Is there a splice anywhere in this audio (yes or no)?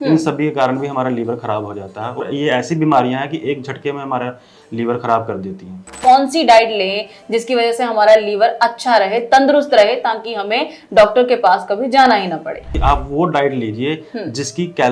yes